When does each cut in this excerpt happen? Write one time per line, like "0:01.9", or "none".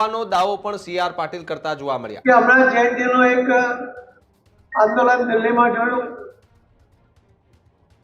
0:02.1